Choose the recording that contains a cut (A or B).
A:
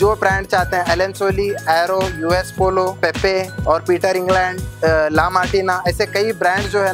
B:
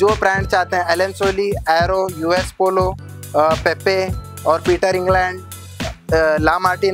A